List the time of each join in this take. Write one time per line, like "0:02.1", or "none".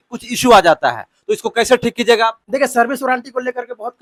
none